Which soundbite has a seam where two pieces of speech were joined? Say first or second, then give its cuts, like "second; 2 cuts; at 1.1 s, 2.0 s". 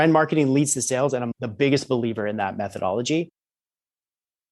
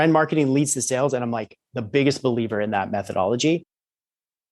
first; 1 cut; at 1.3 s